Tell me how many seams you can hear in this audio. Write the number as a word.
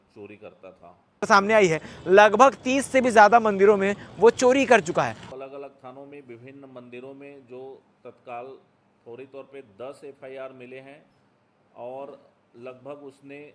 two